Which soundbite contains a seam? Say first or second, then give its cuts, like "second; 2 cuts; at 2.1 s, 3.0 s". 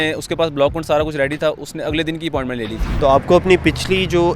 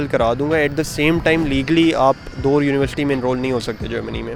first; 1 cut; at 2.8 s